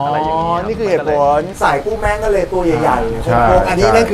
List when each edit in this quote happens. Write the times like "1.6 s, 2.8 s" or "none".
1.5 s